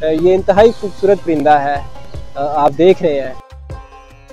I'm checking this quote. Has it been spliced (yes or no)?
yes